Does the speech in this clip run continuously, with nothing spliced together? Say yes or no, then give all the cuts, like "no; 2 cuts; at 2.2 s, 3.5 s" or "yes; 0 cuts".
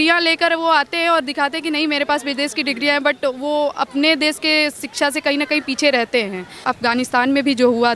no; 1 cut; at 6.6 s